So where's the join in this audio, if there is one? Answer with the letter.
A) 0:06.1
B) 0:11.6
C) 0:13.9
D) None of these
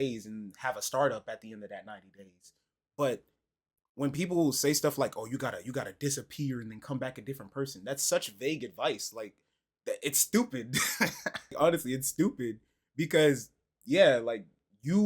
B